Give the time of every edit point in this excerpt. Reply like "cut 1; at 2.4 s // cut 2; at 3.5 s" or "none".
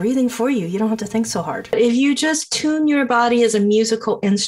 cut 1; at 1.7 s